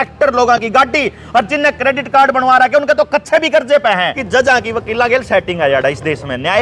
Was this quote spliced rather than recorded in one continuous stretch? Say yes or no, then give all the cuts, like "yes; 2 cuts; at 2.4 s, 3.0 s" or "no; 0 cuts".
yes; 1 cut; at 4.2 s